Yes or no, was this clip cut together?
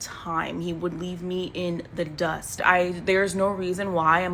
yes